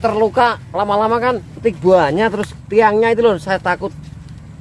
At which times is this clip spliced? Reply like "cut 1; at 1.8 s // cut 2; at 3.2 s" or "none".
cut 1; at 1.6 s